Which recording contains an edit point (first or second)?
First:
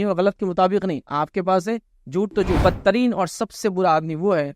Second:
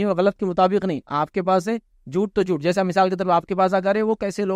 first